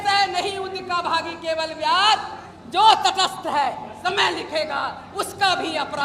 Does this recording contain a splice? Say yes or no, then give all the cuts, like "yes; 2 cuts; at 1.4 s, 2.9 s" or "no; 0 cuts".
yes; 1 cut; at 3.9 s